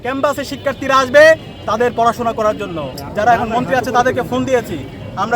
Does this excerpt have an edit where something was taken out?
yes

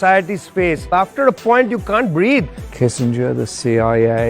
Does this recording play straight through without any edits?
no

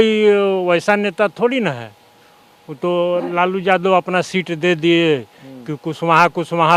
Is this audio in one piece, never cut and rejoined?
yes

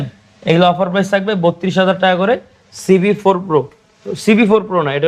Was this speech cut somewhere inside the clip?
no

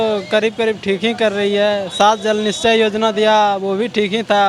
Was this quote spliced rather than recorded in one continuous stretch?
no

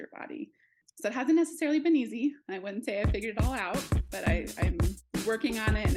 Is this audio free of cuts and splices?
yes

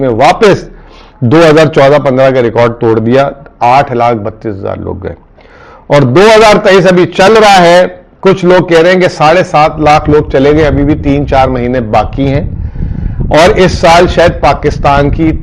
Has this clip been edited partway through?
no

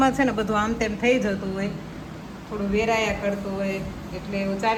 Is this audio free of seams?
yes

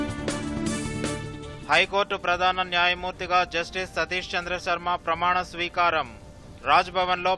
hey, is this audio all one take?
no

